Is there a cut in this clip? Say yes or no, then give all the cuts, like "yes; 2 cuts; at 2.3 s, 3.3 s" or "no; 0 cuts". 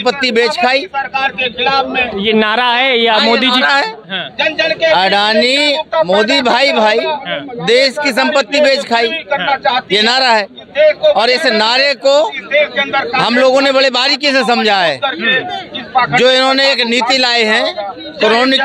no; 0 cuts